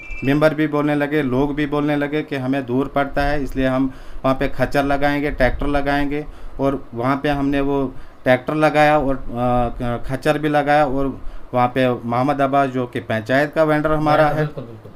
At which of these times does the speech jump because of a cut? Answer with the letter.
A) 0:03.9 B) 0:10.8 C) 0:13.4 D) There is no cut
D